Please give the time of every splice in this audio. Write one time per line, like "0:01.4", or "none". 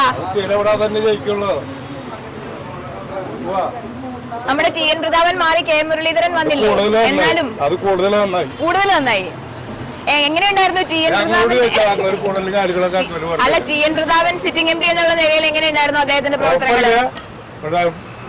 none